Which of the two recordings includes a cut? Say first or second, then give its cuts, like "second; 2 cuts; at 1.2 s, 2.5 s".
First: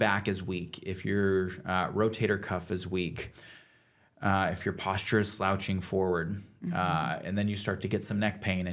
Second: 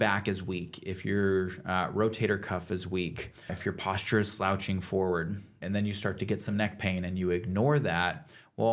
second; 2 cuts; at 3.6 s, 5.6 s